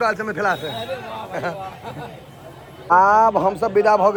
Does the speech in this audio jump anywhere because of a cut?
no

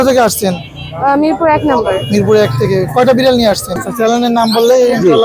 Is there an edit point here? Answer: yes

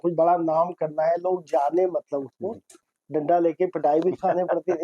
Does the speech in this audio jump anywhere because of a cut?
yes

